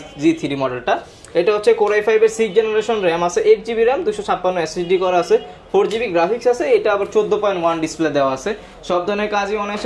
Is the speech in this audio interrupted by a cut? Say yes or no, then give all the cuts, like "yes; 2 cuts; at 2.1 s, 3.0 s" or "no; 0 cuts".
no; 0 cuts